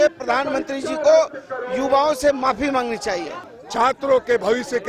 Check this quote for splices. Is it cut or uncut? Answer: cut